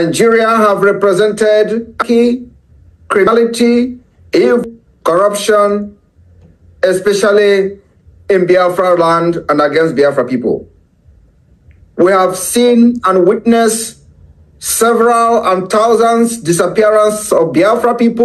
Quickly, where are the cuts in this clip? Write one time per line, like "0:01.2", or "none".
0:02.0
0:03.3
0:04.6